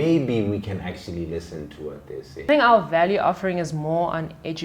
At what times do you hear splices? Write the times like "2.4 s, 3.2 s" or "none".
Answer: 2.5 s